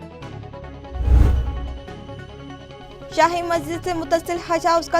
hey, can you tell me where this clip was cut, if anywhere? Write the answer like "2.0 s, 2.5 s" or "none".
1.8 s